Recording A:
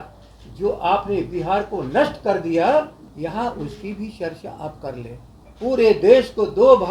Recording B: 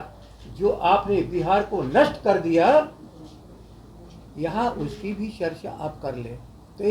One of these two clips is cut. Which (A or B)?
A